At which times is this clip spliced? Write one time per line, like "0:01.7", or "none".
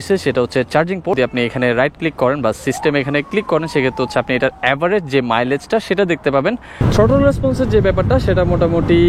0:01.2
0:06.8